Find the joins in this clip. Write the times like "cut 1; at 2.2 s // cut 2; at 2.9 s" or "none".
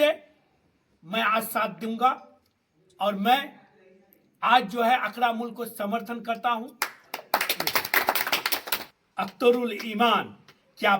cut 1; at 8.8 s

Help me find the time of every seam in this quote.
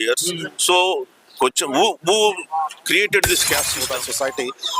cut 1; at 3.8 s

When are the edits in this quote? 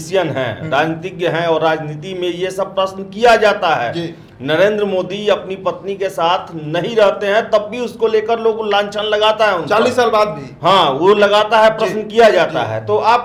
none

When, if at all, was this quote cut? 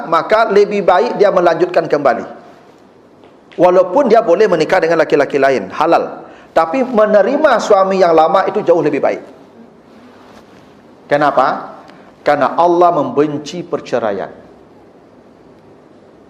none

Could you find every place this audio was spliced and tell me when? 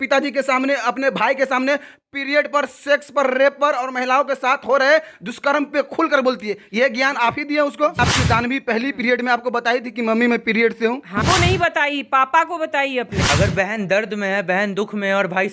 cut 1; at 8.0 s // cut 2; at 11.2 s // cut 3; at 13.1 s

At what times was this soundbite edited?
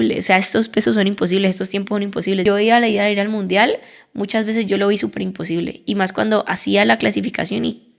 cut 1; at 2.4 s

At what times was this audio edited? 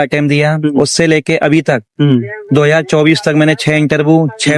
none

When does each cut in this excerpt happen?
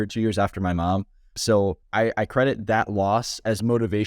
cut 1; at 1.8 s

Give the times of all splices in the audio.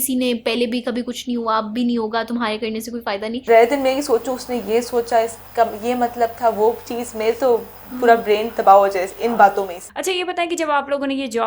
cut 1; at 3.4 s // cut 2; at 9.8 s

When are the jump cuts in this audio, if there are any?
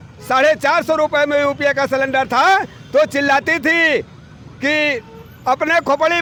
none

